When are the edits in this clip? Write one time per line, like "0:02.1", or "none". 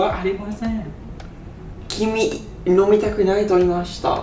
none